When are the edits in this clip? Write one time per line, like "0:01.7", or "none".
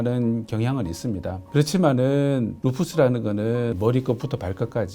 0:01.4
0:03.7